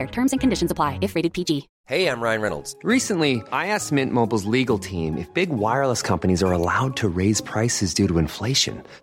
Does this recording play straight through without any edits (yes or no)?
no